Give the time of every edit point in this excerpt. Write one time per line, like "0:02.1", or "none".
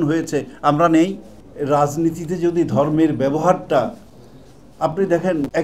0:01.3

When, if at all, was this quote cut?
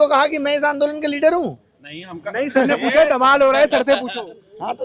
none

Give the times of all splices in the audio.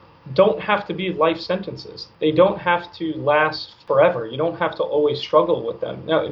0:02.0
0:03.8

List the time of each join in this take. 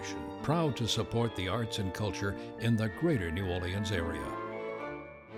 none

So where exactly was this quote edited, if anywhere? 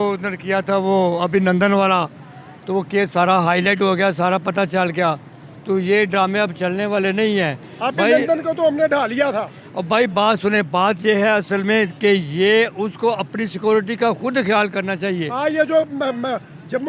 none

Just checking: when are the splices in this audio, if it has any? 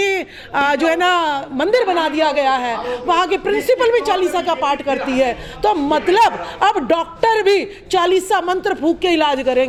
none

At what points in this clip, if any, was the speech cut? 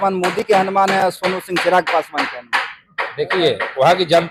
none

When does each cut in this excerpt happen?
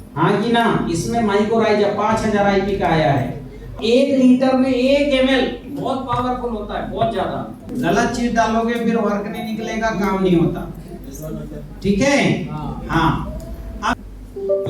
0:03.8
0:07.6
0:13.9

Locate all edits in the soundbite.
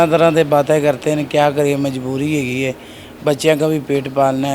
none

